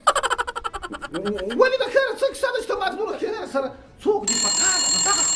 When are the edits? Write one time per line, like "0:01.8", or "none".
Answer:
0:03.3